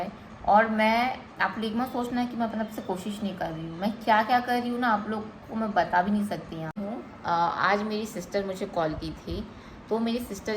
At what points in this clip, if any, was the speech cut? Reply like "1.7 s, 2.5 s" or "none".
6.8 s